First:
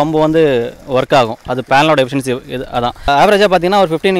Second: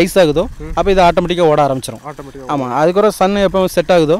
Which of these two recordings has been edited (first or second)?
first